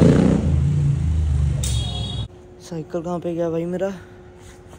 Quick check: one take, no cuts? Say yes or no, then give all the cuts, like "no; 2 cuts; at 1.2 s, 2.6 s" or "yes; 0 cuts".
no; 1 cut; at 2.2 s